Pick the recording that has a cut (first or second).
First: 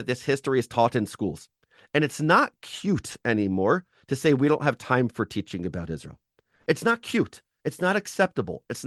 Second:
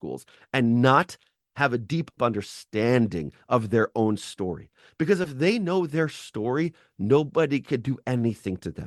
second